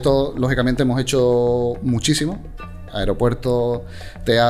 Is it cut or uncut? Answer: cut